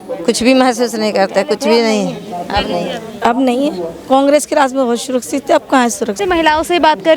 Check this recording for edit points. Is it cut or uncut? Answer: cut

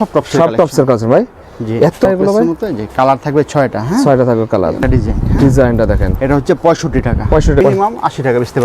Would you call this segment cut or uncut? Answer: cut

